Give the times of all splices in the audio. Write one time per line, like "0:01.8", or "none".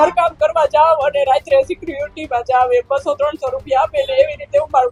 none